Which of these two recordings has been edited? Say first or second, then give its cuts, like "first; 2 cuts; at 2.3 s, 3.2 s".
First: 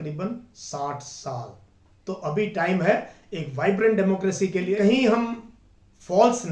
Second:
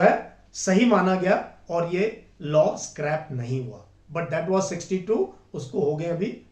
first; 1 cut; at 4.7 s